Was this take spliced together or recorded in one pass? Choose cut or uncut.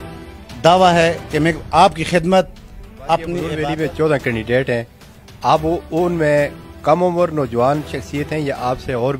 cut